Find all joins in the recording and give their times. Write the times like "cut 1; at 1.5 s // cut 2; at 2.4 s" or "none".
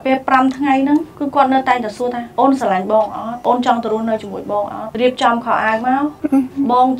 cut 1; at 1.1 s // cut 2; at 2.2 s // cut 3; at 3.3 s // cut 4; at 4.8 s // cut 5; at 6.2 s